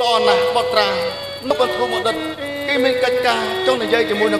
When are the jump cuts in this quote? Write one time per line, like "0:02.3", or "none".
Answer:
0:01.5

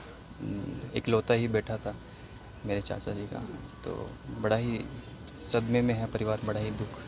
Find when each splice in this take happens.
none

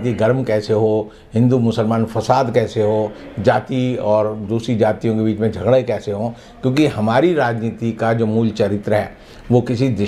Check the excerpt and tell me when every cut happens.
none

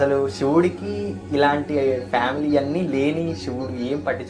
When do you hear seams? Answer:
none

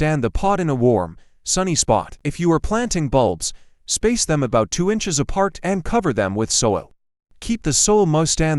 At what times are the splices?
0:02.2

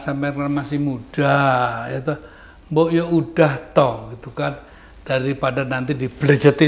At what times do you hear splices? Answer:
none

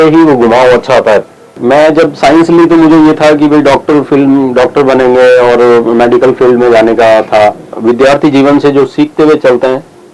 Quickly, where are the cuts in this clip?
0:01.6
0:07.7

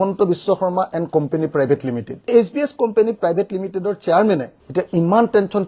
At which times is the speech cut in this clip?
0:02.2

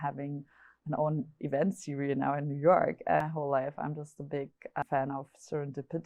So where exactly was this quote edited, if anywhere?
0:03.2
0:04.8

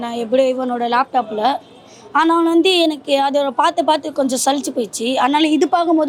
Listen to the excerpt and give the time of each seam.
none

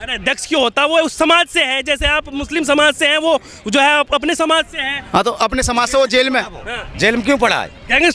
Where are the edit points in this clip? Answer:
none

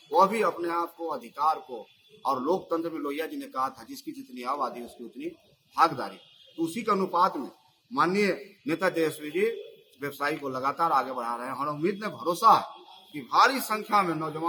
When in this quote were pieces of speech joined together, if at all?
none

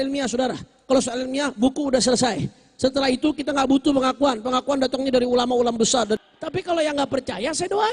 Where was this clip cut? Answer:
0:06.2

